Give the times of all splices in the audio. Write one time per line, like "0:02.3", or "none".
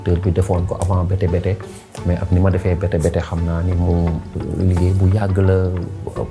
0:04.3